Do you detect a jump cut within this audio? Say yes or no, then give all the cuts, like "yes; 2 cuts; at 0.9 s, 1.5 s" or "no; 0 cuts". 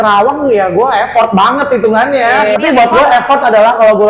yes; 1 cut; at 2.6 s